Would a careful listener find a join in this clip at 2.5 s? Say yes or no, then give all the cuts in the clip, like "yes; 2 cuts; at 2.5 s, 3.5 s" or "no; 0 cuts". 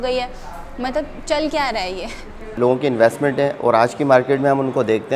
yes; 1 cut; at 2.5 s